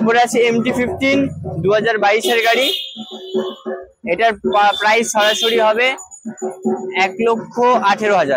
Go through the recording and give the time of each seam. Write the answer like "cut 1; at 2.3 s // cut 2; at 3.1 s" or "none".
none